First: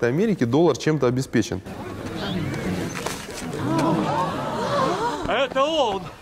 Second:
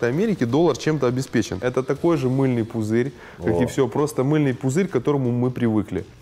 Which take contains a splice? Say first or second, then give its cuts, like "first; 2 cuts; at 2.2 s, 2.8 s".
second; 1 cut; at 1.6 s